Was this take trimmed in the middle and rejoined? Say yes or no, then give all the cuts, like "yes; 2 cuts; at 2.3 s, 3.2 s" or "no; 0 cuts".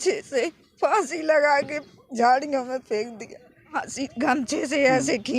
yes; 1 cut; at 3.8 s